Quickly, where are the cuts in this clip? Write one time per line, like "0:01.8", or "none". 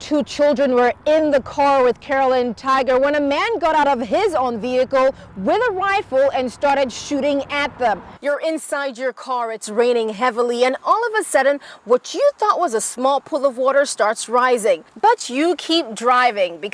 0:08.1

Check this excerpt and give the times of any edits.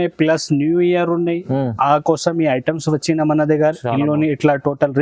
none

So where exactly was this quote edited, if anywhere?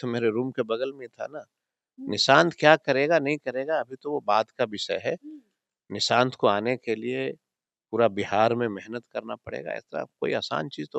none

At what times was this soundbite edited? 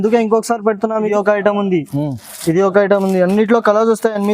0:01.1

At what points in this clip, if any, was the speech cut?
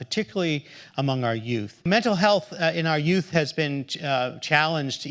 0:01.9

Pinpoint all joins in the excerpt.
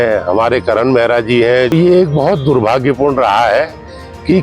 0:01.7

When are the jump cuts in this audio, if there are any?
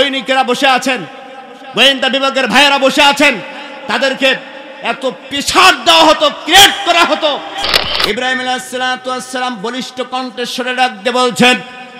0:07.8

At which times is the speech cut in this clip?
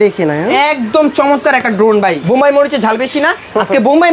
0:02.2

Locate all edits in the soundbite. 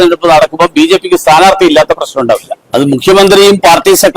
0:02.6

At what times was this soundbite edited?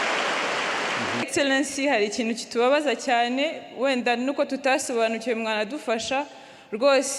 0:01.3

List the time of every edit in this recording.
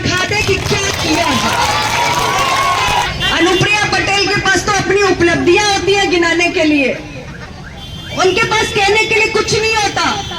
0:03.1

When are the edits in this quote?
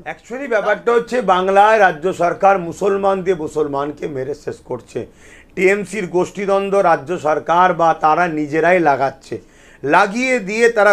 none

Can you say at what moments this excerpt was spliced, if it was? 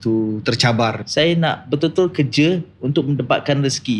0:01.0

